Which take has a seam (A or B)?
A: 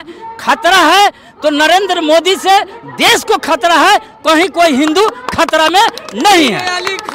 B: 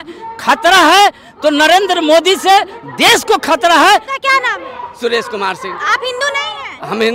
B